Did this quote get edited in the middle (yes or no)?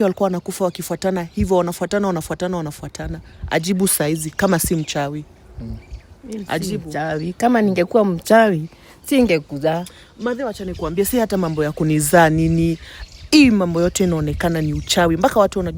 no